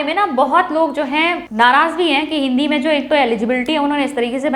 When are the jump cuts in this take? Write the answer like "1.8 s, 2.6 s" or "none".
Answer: 1.4 s